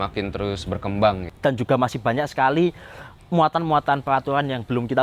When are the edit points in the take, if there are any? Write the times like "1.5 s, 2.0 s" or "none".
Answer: none